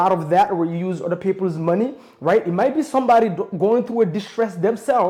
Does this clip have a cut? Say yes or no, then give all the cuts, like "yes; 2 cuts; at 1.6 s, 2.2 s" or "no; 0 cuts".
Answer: no; 0 cuts